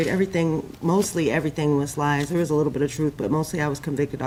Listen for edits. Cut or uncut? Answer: uncut